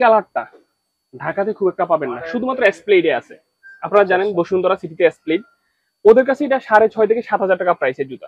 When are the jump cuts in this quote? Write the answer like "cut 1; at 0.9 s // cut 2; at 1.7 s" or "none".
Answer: none